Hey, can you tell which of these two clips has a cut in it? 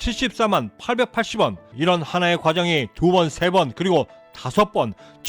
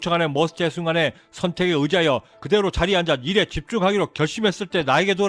first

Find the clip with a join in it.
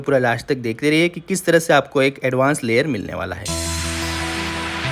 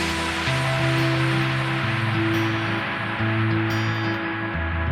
first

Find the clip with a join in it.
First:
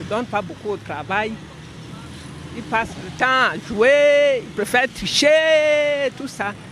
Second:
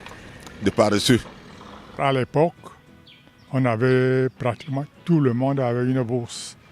second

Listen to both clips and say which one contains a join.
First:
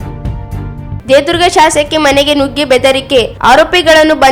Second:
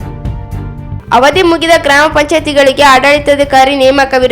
second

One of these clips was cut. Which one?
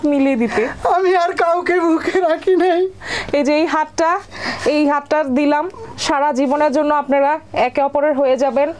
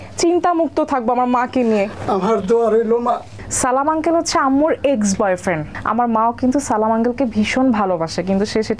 second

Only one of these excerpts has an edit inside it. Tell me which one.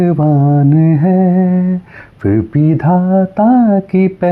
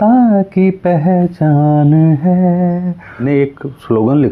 second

